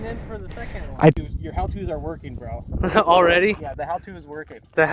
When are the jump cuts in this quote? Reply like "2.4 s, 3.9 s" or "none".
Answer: 1.2 s